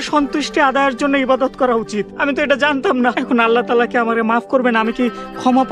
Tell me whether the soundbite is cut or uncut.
cut